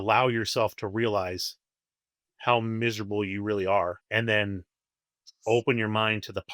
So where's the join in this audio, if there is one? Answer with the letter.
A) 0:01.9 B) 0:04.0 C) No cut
B